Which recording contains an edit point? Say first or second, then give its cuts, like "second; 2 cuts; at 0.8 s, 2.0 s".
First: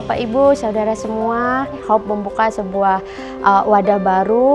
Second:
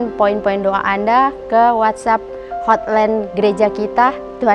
first; 1 cut; at 1.8 s